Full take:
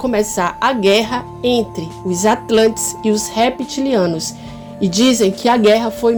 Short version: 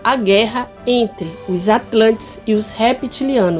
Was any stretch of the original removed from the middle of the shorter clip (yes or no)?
no